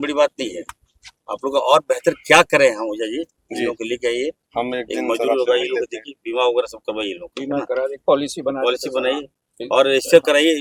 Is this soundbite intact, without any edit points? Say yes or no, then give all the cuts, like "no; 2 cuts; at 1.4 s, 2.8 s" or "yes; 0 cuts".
yes; 0 cuts